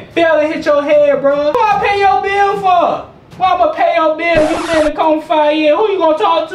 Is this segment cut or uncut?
cut